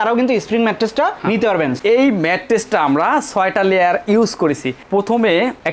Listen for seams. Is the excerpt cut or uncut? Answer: cut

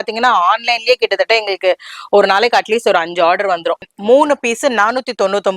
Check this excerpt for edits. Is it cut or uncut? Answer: cut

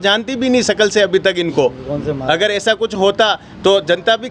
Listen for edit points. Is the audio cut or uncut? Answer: uncut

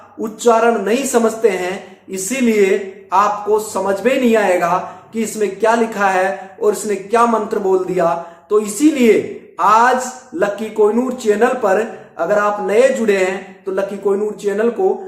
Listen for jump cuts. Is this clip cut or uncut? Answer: uncut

